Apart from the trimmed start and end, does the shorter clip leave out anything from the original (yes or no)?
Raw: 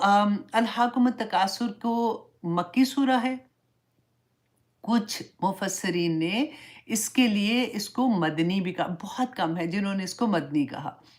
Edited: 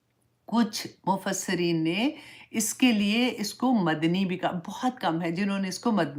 no